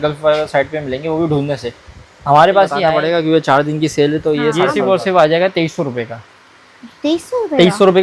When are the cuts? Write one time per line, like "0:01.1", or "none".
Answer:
0:02.9
0:04.7